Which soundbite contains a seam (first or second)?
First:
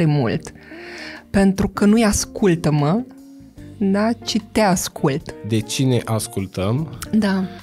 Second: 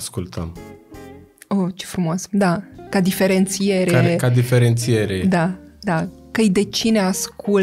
first